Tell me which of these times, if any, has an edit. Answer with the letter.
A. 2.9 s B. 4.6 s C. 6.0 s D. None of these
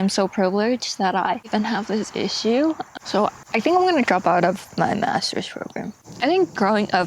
C